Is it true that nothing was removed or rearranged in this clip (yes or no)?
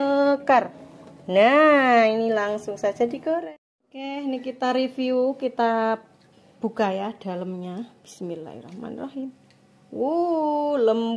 no